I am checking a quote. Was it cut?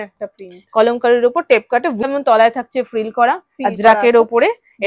yes; 1 cut; at 2.0 s

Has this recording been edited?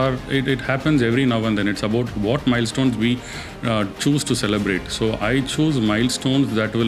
no; 0 cuts

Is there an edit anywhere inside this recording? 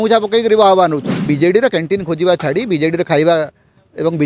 yes; 1 cut; at 1.1 s

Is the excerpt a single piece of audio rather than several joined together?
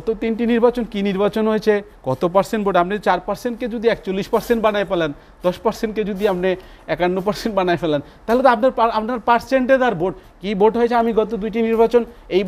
yes; 0 cuts

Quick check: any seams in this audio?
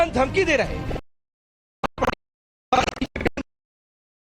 yes; 1 cut; at 1.9 s

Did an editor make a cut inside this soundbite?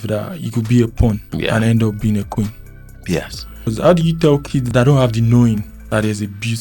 yes; 4 cuts; at 1.3 s, 3.7 s, 4.7 s, 5.7 s

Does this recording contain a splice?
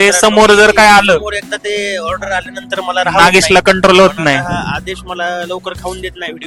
no; 0 cuts

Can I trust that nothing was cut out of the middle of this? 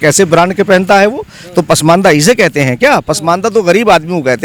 yes; 0 cuts

